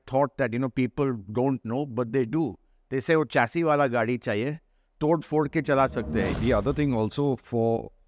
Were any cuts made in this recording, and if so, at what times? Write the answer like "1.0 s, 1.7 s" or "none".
6.3 s